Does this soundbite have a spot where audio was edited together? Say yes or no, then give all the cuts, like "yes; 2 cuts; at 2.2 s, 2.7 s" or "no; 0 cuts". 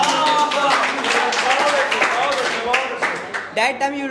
no; 0 cuts